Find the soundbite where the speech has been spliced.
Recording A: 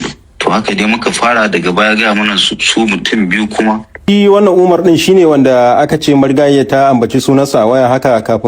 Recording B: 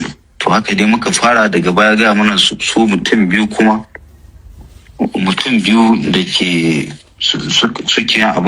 A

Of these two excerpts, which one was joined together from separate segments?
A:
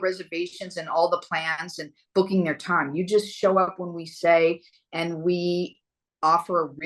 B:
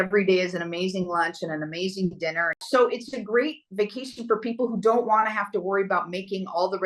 B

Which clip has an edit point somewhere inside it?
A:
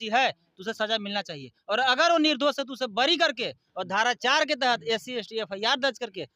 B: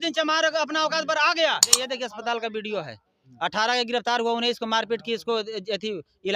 B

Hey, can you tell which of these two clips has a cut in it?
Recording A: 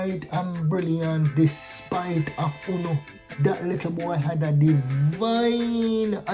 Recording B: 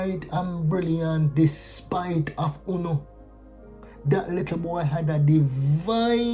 A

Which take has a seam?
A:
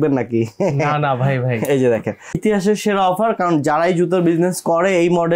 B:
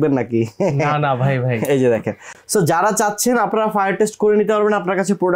A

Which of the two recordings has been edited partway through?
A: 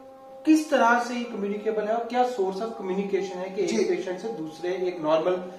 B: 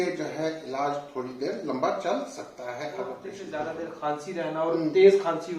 B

